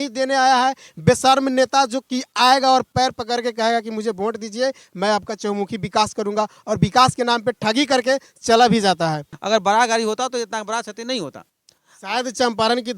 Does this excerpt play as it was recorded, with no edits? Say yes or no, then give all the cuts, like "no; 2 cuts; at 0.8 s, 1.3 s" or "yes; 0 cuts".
no; 1 cut; at 9.3 s